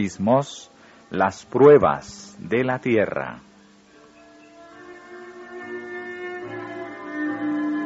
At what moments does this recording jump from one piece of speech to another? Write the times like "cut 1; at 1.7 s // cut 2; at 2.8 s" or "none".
cut 1; at 6.2 s